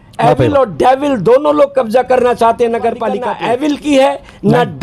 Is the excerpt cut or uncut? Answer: cut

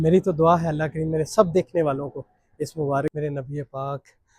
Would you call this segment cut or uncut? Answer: cut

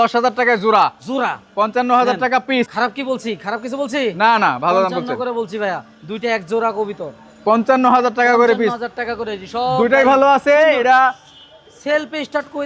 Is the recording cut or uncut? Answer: uncut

